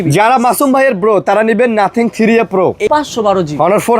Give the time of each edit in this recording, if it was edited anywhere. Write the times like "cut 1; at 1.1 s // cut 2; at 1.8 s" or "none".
cut 1; at 2.9 s